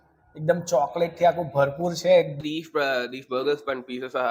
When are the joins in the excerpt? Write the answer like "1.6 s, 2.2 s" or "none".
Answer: 2.4 s